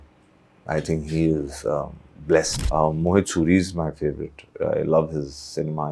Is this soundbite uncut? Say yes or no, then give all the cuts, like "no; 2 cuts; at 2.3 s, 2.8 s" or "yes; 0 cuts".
no; 1 cut; at 2.6 s